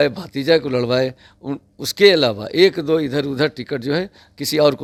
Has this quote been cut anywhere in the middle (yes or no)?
no